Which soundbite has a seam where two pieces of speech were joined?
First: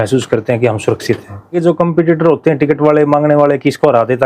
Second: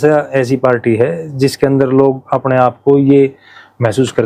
first; 1 cut; at 1.5 s

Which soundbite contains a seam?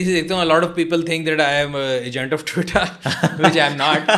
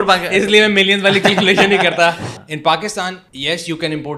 second; 2 cuts; at 2.2 s, 3.3 s

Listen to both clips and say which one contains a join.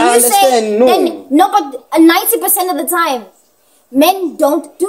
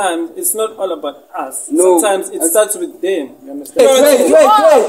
second; 1 cut; at 3.8 s

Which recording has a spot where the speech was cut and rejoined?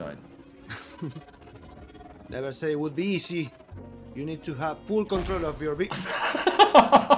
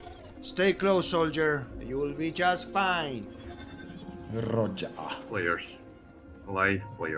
second; 1 cut; at 5.5 s

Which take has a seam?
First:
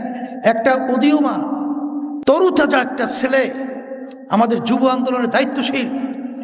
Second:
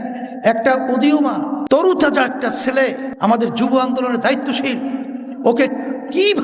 second; 2 cuts; at 1.8 s, 3.1 s

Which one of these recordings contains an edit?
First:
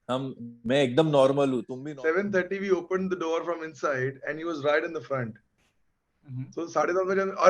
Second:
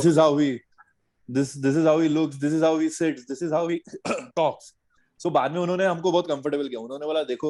first; 1 cut; at 1.8 s

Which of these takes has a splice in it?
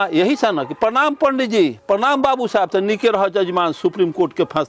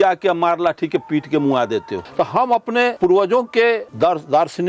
second; 3 cuts; at 2.0 s, 3.0 s, 3.9 s

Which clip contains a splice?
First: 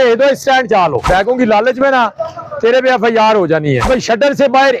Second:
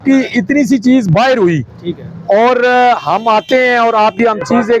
first; 2 cuts; at 1.0 s, 3.9 s

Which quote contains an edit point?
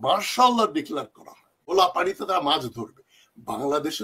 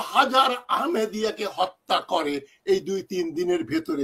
first; 1 cut; at 1.6 s

